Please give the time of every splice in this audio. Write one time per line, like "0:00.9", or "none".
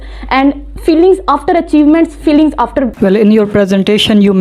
0:02.9